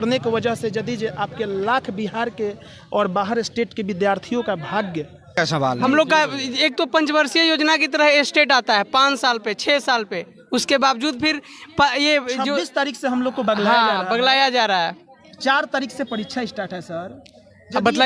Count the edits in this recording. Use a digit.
1